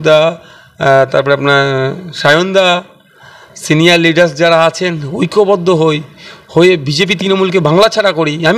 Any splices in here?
no; 0 cuts

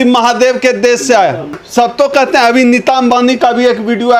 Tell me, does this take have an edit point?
no; 0 cuts

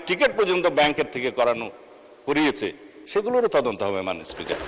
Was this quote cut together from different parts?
no; 0 cuts

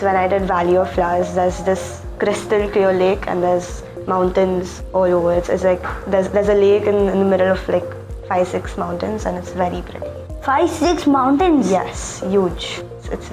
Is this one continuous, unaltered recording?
yes; 0 cuts

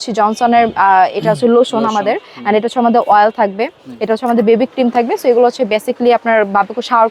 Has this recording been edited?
no; 0 cuts

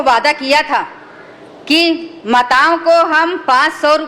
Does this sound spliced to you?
no; 0 cuts

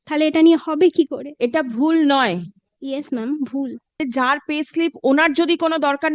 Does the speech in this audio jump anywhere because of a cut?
yes; 1 cut; at 4.0 s

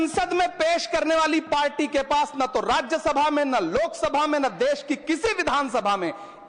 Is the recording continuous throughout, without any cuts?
yes; 0 cuts

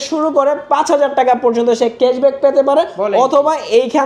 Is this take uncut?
yes; 0 cuts

